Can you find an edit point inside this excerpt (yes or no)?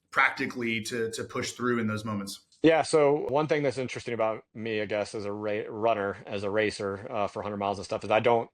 yes